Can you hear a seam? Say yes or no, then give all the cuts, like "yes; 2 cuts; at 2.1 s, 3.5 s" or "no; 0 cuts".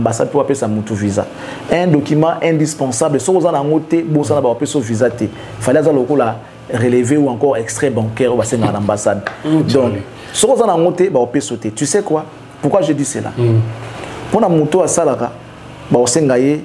no; 0 cuts